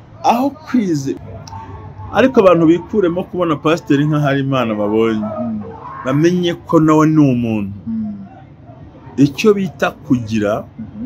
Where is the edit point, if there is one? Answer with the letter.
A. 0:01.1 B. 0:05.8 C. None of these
A